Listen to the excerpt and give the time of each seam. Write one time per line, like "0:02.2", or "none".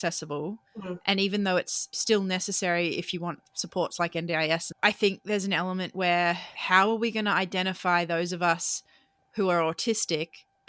0:01.9

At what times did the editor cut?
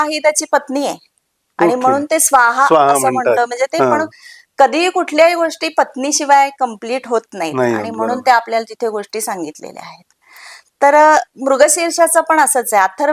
none

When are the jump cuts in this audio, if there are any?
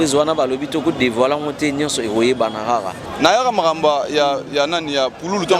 0:03.0

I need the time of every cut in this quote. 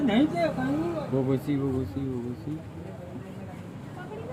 none

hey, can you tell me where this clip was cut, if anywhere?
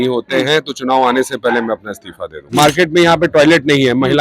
0:02.4

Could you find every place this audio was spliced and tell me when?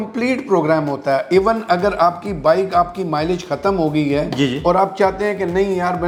none

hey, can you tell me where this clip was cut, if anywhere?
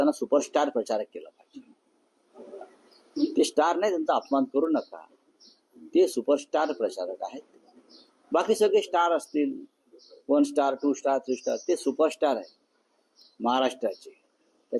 0:08.6

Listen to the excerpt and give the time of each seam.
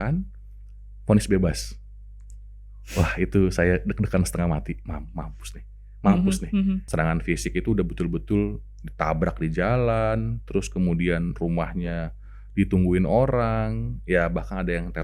0:06.9

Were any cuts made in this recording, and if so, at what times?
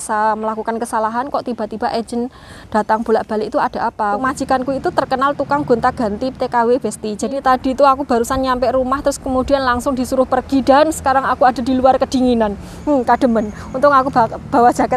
0:04.2
0:07.4

